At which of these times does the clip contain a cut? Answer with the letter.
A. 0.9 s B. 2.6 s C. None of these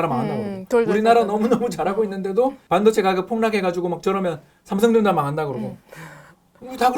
B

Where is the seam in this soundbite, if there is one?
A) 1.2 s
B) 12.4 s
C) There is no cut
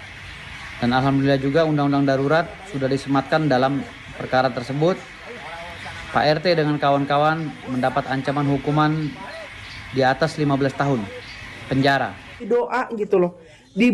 B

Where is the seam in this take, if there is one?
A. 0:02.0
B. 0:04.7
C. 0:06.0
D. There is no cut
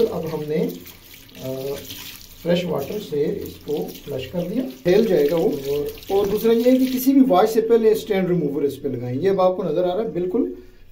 B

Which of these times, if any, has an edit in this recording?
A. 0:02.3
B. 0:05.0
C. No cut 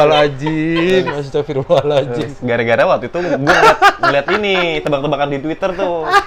C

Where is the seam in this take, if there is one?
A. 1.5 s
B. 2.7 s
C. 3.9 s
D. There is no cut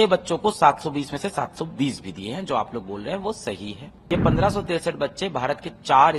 C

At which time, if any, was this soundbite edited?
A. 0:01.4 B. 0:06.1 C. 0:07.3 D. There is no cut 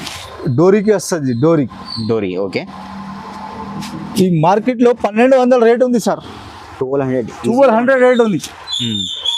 D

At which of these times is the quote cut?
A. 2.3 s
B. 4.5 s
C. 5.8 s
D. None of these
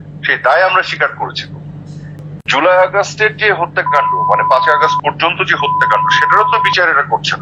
A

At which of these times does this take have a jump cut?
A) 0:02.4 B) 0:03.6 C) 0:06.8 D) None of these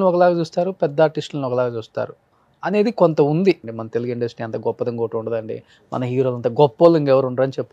B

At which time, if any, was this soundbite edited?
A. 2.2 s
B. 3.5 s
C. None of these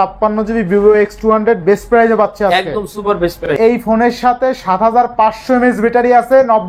B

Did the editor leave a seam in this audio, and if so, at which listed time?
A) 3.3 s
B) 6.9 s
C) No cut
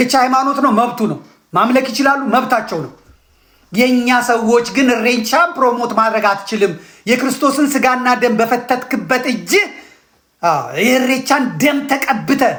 C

